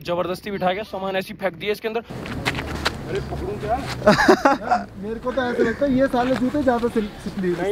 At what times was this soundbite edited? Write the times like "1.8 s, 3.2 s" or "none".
2.1 s